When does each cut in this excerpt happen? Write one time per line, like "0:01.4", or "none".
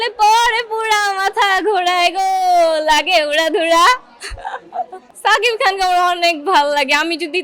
0:05.0